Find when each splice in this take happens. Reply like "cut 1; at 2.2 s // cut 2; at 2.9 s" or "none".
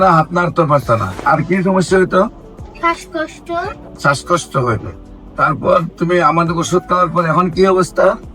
cut 1; at 1.2 s // cut 2; at 3.8 s